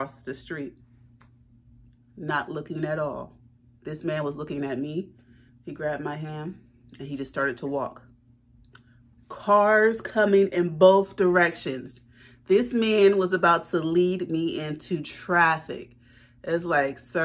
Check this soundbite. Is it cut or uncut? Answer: uncut